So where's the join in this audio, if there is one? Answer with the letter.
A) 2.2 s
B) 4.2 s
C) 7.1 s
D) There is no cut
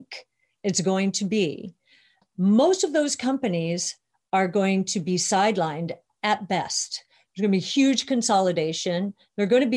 A